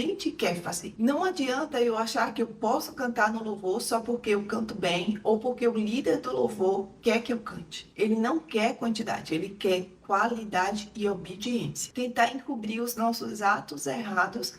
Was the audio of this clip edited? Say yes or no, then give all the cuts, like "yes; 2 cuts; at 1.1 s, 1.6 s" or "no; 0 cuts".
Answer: yes; 3 cuts; at 0.9 s, 7.9 s, 11.9 s